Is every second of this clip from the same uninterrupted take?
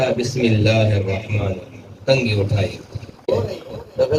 no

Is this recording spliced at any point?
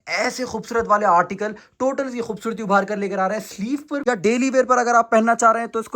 yes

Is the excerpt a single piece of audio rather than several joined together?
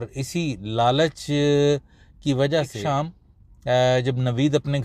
no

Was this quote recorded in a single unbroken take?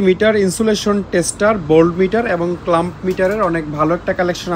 yes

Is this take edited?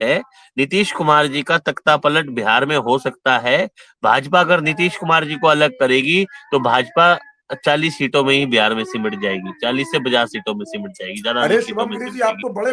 no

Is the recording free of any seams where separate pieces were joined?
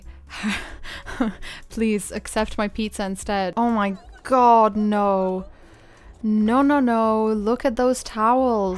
no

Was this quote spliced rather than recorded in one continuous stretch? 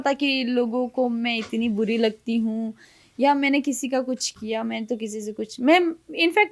no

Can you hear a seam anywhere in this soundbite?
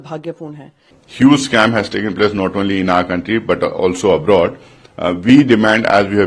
yes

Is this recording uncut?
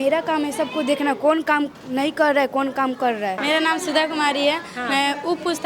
no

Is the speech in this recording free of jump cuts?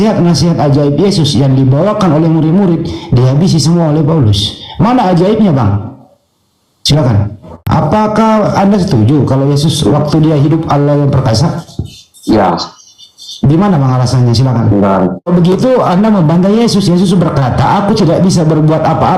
no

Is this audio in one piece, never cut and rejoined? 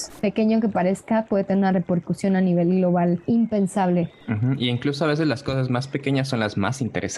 no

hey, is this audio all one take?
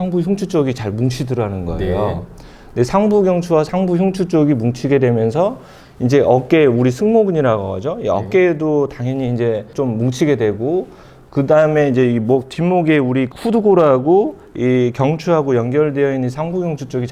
yes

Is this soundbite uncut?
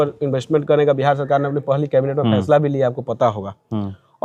yes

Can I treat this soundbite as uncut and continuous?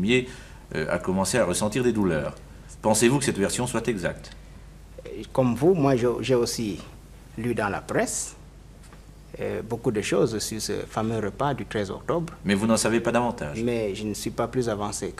yes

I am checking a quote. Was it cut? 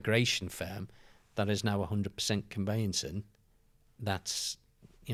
no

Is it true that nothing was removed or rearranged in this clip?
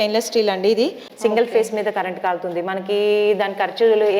no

